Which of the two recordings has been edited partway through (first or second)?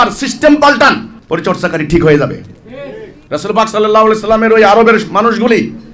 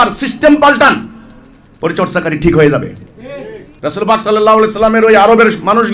first